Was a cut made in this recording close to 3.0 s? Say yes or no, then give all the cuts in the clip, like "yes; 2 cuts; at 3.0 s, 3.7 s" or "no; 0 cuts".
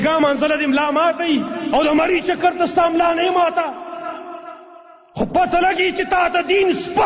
no; 1 cut; at 1.5 s